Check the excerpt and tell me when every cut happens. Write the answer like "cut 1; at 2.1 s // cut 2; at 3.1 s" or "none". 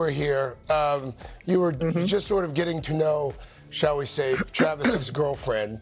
none